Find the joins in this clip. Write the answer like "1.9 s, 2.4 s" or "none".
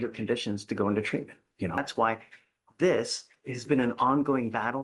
1.8 s